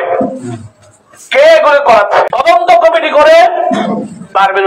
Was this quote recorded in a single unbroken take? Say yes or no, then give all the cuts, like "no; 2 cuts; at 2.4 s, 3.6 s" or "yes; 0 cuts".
no; 1 cut; at 2.3 s